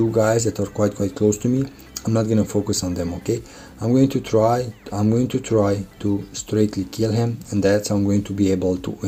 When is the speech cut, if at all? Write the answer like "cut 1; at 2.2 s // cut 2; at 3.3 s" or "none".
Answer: none